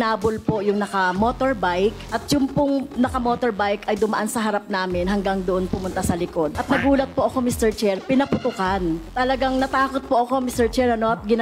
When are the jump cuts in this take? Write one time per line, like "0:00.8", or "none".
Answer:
0:06.6
0:09.1